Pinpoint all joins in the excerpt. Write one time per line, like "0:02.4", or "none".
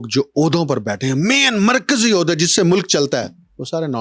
none